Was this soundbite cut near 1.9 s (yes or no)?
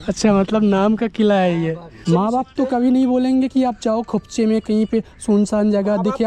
yes